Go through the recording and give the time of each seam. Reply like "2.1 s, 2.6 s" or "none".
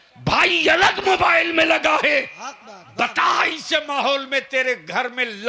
none